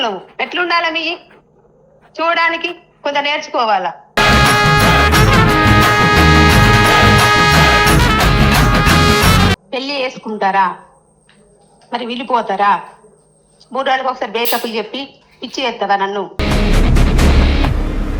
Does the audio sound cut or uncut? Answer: cut